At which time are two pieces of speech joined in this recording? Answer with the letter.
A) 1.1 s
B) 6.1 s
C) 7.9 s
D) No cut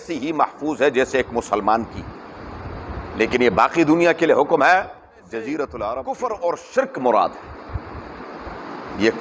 B